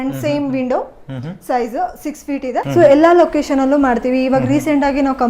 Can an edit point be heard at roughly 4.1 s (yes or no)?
no